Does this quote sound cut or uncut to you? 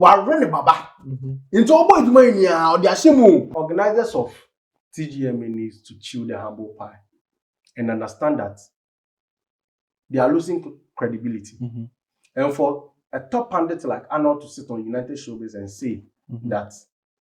cut